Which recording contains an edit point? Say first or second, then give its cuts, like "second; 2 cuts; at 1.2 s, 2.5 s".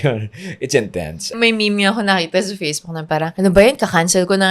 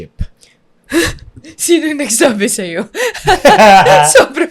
first; 2 cuts; at 1.3 s, 3.3 s